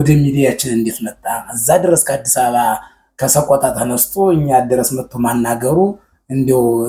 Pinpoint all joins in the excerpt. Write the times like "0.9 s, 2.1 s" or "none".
none